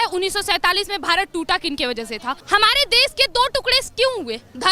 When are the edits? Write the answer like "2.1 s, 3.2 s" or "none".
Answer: 2.4 s